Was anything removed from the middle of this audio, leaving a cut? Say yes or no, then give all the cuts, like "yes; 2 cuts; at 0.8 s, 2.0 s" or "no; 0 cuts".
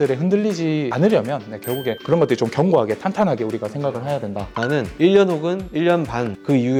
no; 0 cuts